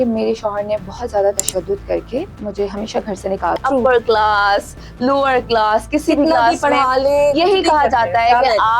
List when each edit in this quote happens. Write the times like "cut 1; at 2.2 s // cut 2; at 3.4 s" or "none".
cut 1; at 3.6 s